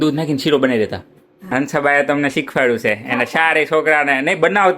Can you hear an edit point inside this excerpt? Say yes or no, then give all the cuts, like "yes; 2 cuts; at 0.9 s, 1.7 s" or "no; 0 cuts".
yes; 1 cut; at 1.5 s